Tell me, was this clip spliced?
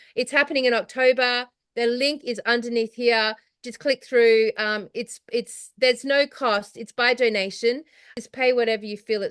yes; 1 cut; at 8.1 s

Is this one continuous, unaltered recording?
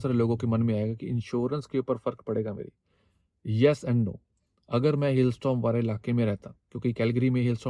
yes; 0 cuts

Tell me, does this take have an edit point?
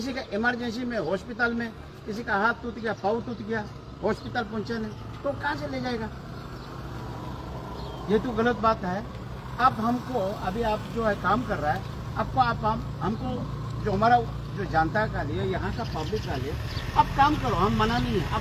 no; 0 cuts

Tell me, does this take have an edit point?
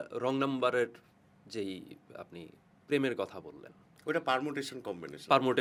no; 0 cuts

